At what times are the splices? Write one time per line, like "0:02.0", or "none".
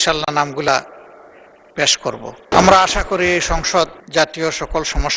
0:02.5
0:04.0